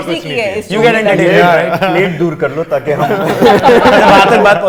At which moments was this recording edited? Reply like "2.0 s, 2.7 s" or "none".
none